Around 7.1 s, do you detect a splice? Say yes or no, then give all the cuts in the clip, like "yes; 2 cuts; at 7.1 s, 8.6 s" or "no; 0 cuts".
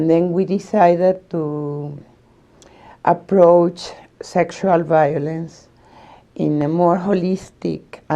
yes; 1 cut; at 7.1 s